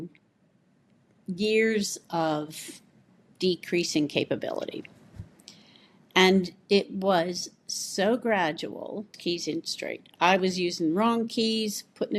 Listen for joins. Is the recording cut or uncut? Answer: cut